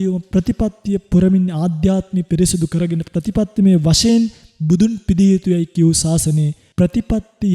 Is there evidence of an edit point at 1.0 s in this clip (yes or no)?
no